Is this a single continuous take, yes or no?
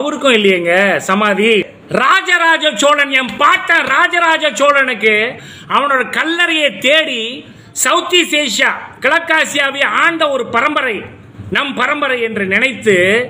no